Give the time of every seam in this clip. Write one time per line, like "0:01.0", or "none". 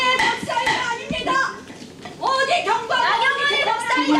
none

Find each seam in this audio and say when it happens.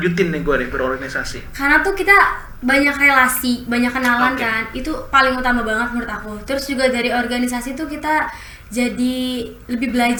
none

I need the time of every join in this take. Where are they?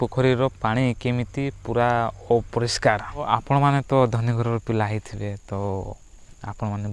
0:03.3

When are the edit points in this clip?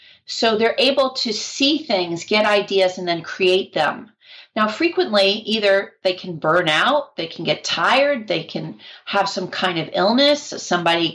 none

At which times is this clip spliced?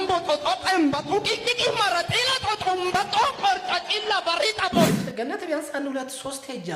0:04.9

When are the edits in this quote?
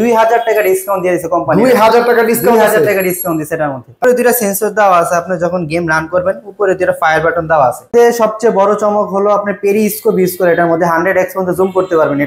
0:04.1
0:07.9

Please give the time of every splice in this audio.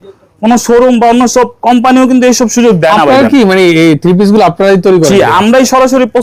none

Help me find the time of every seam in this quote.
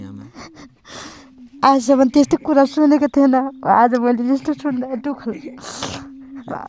0:01.4

